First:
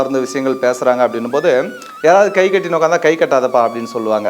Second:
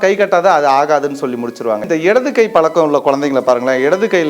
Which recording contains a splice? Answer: second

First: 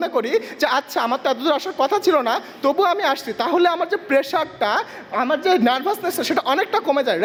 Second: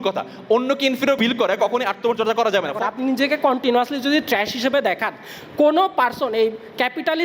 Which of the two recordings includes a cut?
second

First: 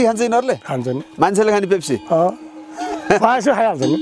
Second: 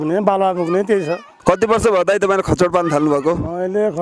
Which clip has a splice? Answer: second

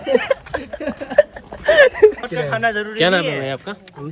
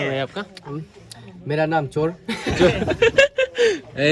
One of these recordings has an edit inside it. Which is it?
first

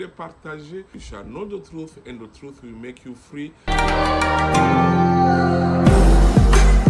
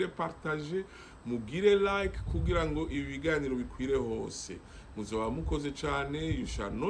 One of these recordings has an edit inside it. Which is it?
first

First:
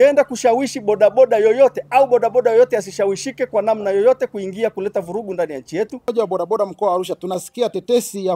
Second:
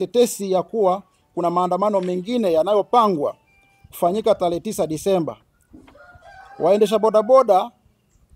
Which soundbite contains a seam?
first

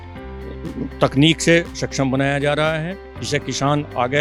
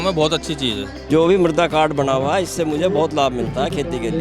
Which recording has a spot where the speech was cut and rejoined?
second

